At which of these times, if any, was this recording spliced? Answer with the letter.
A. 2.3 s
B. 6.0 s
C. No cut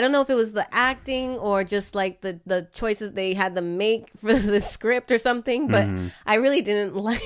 C